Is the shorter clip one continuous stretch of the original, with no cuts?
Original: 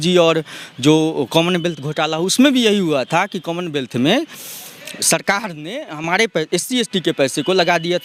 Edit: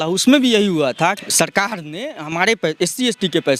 no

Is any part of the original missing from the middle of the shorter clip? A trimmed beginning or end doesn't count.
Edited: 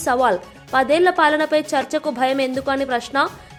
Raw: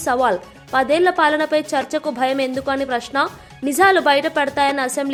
no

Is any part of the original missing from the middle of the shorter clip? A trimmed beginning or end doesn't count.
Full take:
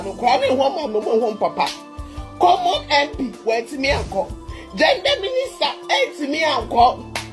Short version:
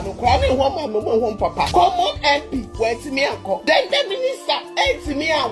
yes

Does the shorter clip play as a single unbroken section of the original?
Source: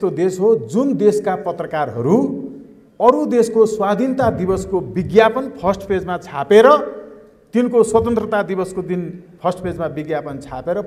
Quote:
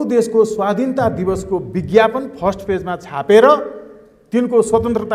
yes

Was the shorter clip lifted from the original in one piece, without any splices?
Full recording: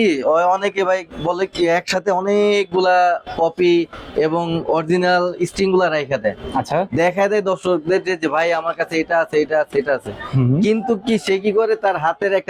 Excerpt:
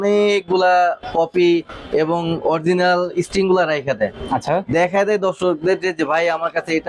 yes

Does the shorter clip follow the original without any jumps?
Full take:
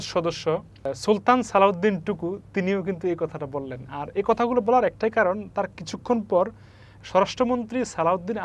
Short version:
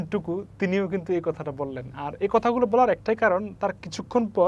yes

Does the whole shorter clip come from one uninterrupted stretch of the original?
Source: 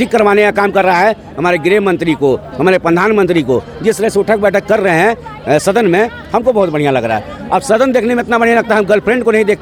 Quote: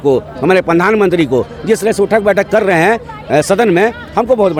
yes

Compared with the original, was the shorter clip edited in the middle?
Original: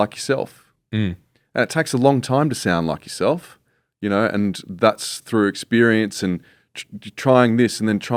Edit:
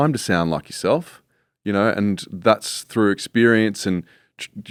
no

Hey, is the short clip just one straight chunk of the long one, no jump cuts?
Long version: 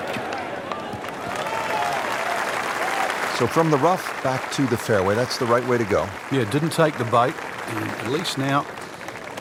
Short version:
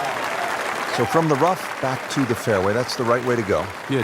no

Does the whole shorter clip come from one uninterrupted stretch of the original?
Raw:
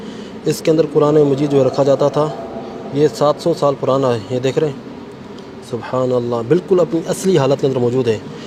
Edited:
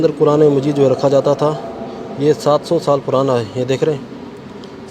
yes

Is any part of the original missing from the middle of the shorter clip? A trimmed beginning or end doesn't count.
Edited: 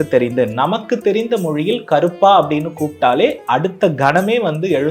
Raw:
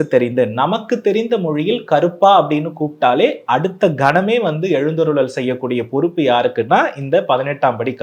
no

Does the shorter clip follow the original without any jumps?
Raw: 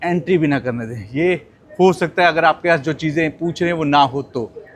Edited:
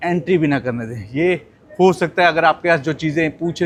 yes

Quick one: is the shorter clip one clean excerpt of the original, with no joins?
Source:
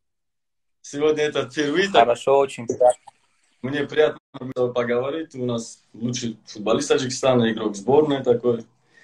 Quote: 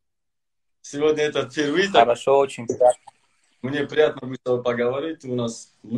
no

